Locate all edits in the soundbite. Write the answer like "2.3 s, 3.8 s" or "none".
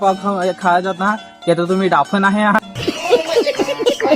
2.7 s